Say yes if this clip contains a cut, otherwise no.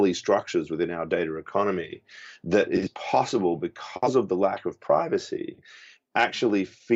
no